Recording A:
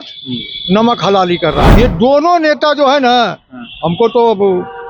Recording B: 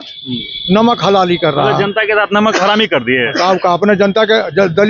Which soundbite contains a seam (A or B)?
A